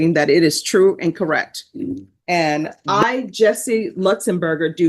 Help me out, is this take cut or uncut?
cut